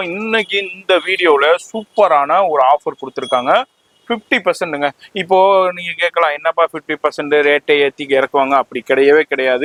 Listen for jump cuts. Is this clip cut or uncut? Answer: uncut